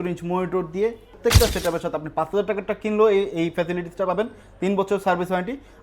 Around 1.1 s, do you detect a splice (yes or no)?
yes